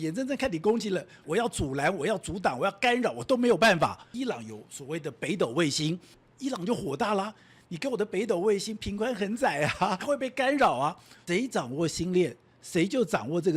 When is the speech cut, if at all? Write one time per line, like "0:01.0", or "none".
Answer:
0:01.2
0:04.1
0:06.2
0:10.0
0:11.1